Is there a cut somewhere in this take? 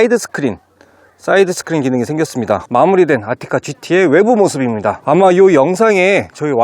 yes; 2 cuts; at 2.6 s, 5.0 s

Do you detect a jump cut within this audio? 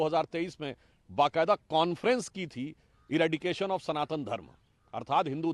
no; 0 cuts

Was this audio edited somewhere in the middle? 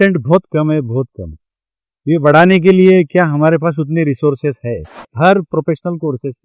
yes; 1 cut; at 5.1 s

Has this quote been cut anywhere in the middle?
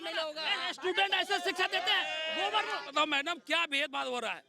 yes; 1 cut; at 2.8 s

